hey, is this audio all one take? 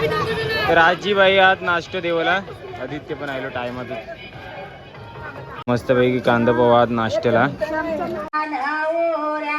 no; 2 cuts; at 5.7 s, 8.3 s

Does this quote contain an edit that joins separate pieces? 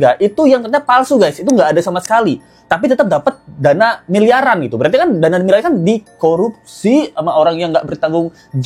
no; 0 cuts

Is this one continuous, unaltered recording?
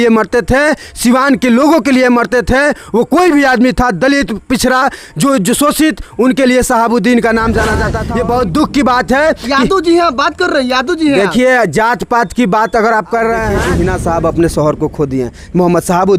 no; 2 cuts; at 8.0 s, 13.6 s

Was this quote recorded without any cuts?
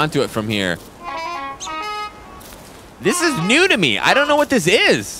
no; 1 cut; at 0.9 s

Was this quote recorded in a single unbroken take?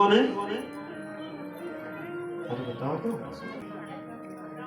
no; 1 cut; at 3.6 s

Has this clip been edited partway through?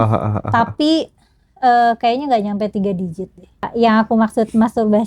yes; 1 cut; at 3.7 s

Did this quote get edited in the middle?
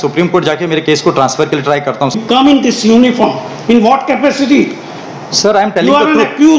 yes; 1 cut; at 2.2 s

